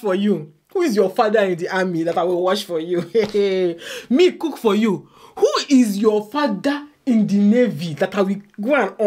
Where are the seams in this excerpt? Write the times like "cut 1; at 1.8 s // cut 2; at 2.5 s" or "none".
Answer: none